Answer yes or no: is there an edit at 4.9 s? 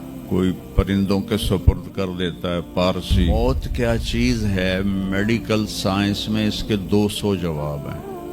no